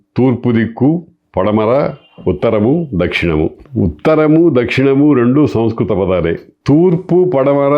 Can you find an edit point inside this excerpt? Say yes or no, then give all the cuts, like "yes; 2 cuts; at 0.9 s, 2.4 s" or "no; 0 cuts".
yes; 2 cuts; at 3.6 s, 6.5 s